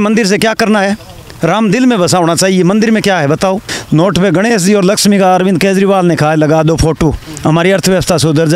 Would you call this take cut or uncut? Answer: cut